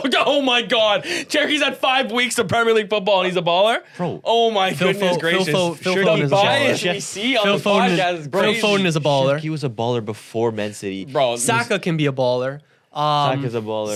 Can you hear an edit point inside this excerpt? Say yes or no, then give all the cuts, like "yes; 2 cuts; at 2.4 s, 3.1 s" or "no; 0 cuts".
no; 0 cuts